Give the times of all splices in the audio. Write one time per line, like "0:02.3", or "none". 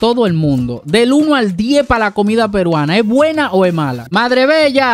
0:04.0